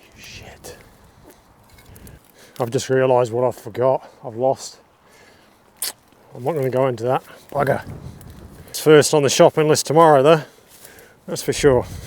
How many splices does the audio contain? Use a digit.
2